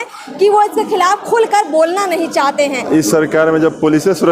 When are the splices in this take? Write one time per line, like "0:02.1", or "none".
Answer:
0:02.8